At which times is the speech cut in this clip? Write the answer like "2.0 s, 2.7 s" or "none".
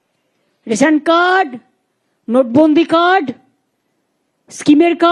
none